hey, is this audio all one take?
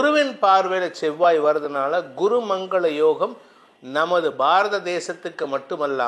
yes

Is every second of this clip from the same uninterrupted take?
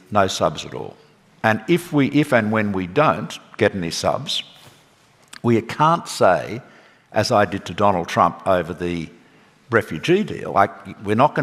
yes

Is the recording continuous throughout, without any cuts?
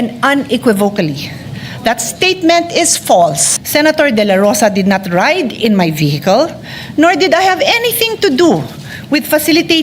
no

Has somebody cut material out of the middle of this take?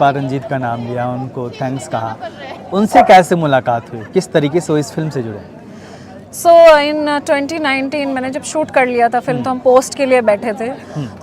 no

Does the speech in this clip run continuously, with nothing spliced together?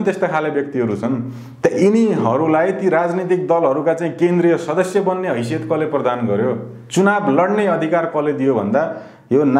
yes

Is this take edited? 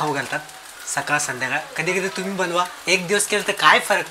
no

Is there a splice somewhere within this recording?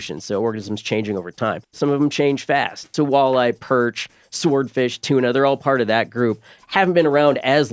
yes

